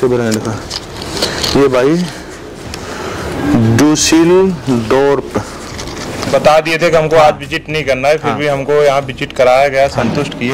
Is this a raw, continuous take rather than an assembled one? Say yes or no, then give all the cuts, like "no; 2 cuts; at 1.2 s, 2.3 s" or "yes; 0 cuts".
no; 1 cut; at 6.3 s